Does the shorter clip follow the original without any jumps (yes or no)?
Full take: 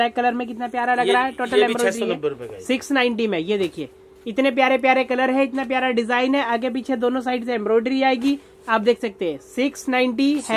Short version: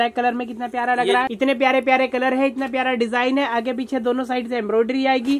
no